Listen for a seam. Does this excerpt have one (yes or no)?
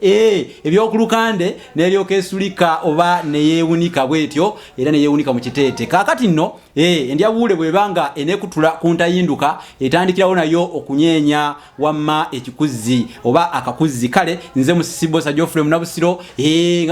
no